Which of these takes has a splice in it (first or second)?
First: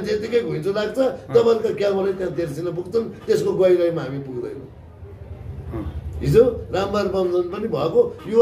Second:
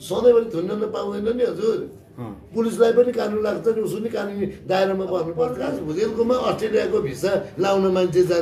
second